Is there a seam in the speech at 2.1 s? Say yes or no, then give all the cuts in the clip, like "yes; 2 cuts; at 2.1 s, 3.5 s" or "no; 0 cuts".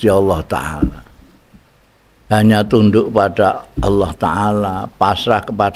no; 0 cuts